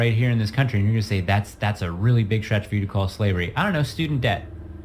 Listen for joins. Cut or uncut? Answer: uncut